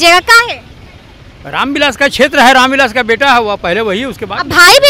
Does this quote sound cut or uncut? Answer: uncut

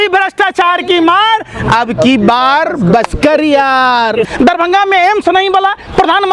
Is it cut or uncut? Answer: cut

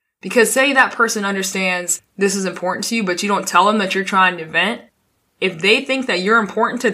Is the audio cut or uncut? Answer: uncut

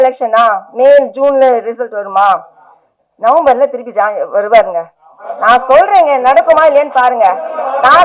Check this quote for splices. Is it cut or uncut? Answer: uncut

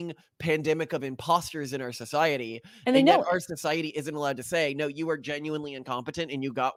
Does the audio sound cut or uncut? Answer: uncut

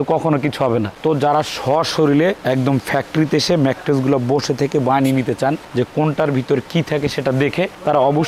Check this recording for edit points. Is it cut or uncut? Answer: cut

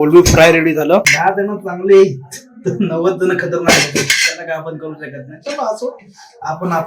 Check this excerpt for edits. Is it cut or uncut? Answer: cut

